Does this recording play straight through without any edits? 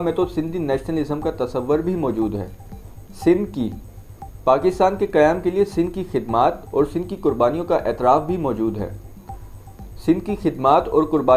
yes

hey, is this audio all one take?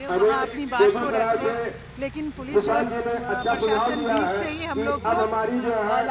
yes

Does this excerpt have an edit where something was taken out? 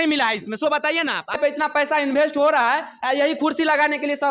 yes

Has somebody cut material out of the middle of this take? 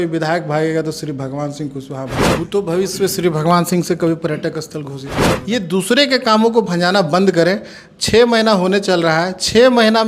yes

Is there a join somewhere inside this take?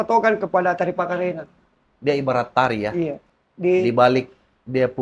yes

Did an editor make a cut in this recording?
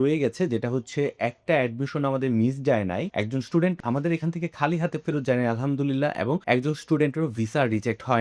yes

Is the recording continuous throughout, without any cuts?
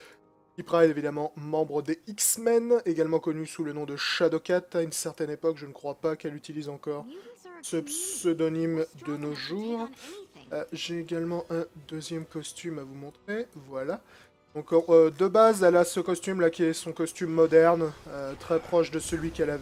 yes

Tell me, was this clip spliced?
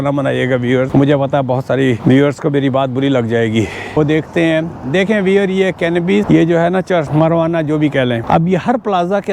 yes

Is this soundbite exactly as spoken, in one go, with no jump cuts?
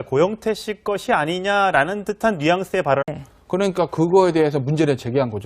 yes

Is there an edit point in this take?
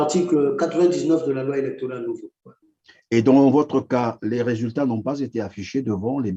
no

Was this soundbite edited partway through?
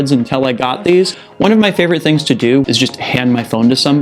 yes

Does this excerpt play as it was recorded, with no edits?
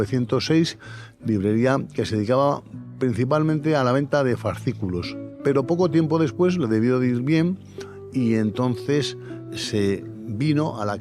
no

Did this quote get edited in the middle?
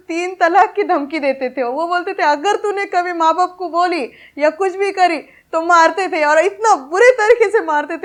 no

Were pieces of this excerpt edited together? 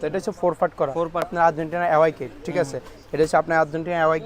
yes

